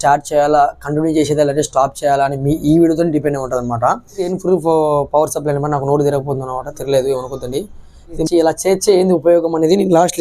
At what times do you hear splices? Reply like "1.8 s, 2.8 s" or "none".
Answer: 4.3 s, 8.2 s